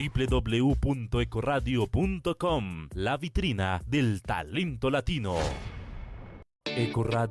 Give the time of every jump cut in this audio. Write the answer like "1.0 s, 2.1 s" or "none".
none